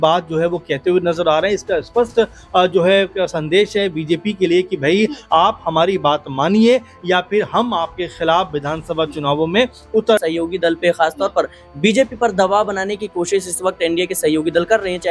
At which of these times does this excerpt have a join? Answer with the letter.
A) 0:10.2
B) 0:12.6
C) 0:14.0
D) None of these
A